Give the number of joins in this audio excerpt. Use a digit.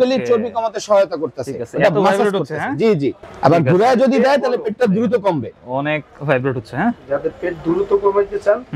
0